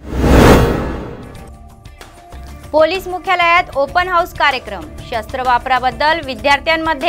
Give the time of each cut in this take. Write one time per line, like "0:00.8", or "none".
0:02.3